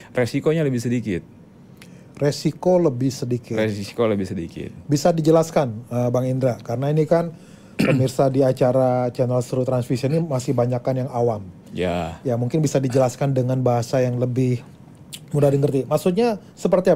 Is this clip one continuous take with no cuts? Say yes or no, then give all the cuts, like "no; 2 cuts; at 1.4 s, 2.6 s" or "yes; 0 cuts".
yes; 0 cuts